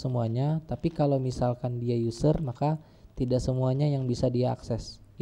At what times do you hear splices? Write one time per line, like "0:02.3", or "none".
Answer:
none